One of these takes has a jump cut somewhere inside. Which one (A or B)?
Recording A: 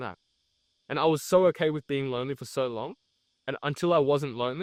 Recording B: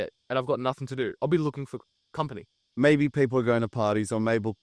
B